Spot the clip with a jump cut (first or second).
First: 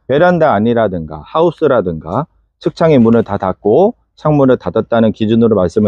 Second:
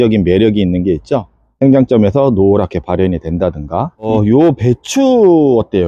second